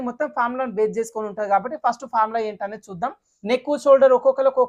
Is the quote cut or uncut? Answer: cut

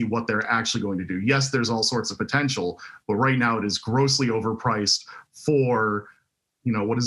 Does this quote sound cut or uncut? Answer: uncut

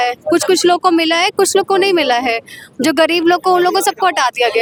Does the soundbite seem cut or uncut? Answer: uncut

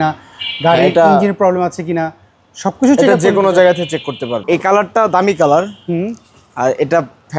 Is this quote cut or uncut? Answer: cut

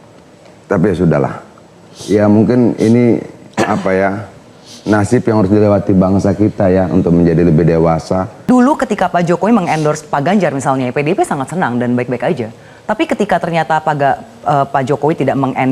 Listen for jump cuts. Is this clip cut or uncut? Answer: cut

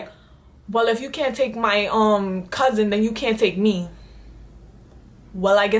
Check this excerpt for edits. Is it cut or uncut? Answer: uncut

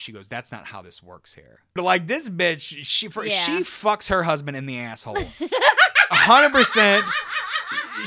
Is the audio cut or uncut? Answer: uncut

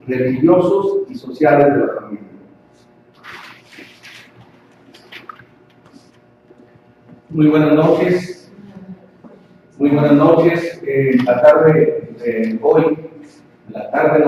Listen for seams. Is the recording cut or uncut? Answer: uncut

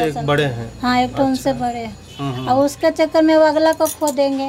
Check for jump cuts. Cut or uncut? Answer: uncut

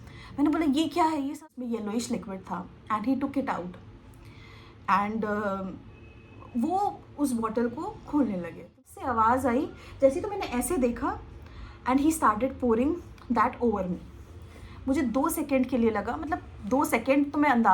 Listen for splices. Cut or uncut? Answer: cut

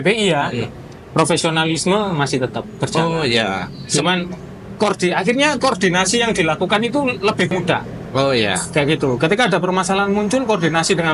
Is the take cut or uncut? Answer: uncut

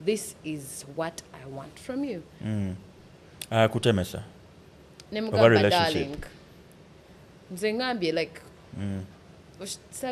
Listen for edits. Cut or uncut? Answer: uncut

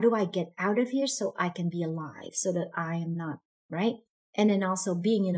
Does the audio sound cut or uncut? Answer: cut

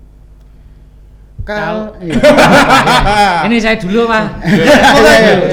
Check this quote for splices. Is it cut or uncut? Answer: uncut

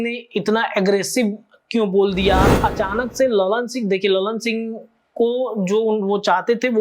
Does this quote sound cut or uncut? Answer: cut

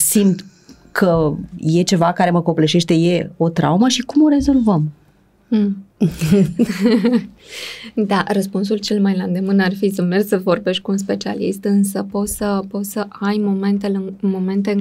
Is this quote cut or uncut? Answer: uncut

